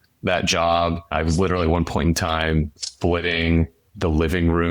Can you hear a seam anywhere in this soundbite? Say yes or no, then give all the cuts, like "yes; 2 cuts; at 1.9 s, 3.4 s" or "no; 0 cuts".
yes; 2 cuts; at 1.1 s, 2.8 s